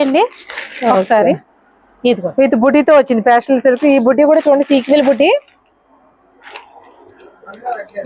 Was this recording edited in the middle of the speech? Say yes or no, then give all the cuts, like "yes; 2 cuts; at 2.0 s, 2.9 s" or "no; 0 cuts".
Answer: no; 0 cuts